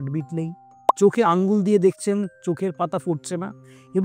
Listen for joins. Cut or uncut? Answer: uncut